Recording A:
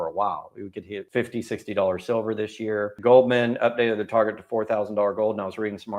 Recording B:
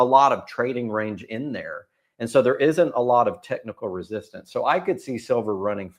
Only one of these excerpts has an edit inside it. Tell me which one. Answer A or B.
A